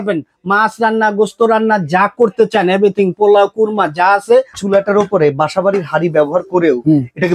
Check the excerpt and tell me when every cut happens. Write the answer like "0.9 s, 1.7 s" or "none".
4.6 s